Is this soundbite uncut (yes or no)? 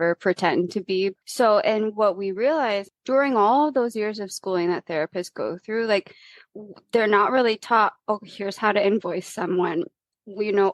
no